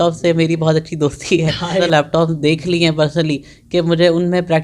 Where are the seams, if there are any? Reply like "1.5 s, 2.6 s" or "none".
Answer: 1.8 s